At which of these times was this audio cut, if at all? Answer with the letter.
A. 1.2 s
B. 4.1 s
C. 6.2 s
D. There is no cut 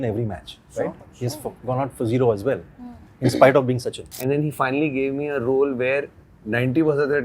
B